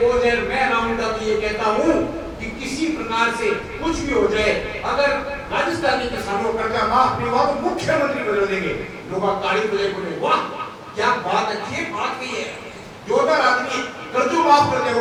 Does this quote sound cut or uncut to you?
uncut